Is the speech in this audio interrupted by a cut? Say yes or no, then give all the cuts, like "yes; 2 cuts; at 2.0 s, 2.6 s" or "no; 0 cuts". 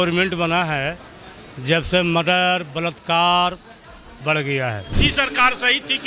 yes; 1 cut; at 4.9 s